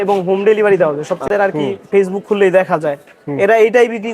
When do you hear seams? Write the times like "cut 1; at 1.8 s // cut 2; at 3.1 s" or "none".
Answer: cut 1; at 1.3 s

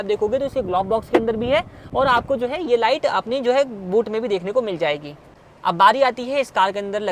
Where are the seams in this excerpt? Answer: none

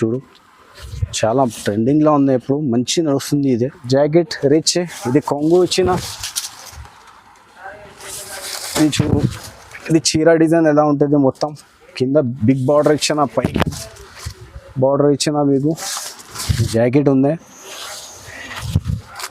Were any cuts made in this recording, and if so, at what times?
cut 1; at 3.8 s // cut 2; at 16.7 s

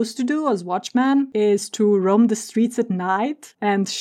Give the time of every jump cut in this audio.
cut 1; at 1.3 s

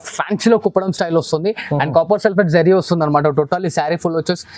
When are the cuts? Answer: none

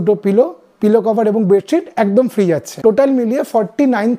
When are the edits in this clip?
cut 1; at 2.7 s

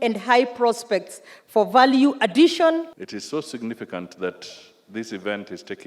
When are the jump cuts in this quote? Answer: cut 1; at 2.9 s

